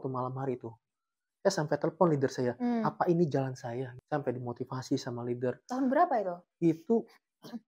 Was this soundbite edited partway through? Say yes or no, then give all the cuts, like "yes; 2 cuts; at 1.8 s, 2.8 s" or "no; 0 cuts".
yes; 1 cut; at 3.9 s